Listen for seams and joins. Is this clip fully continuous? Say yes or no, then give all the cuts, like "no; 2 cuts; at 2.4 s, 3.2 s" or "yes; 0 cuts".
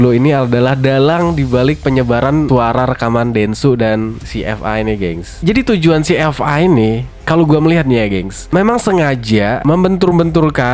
no; 2 cuts; at 5.4 s, 9.6 s